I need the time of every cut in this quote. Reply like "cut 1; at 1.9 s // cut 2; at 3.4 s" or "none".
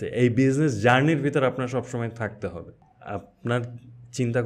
cut 1; at 2.9 s